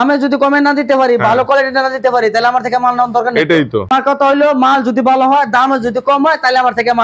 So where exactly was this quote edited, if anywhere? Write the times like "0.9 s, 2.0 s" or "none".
3.9 s